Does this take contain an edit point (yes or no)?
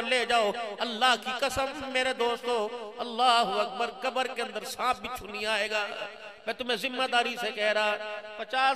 no